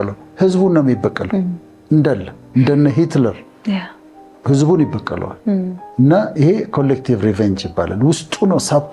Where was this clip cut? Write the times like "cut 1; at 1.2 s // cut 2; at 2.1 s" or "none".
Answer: none